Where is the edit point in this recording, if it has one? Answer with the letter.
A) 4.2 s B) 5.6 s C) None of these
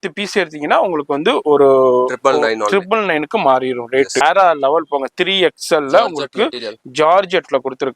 A